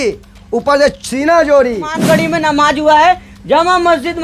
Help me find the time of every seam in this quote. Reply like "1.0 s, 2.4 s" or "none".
1.9 s